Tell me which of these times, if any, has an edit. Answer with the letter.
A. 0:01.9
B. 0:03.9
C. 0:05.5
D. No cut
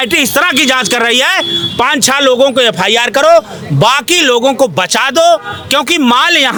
D